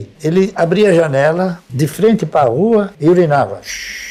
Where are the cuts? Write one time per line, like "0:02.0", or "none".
none